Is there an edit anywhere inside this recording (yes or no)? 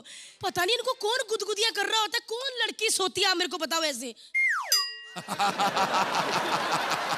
no